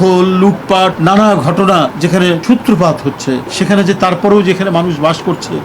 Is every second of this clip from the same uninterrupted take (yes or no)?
no